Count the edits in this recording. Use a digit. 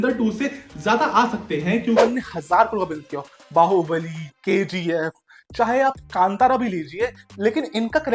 1